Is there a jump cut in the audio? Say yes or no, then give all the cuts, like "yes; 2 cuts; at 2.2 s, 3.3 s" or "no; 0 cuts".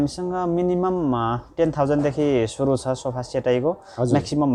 no; 0 cuts